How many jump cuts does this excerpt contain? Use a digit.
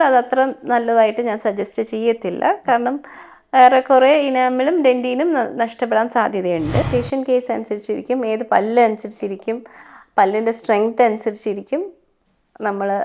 1